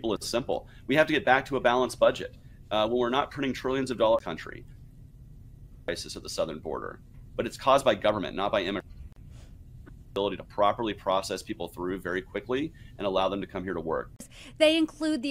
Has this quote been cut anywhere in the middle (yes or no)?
no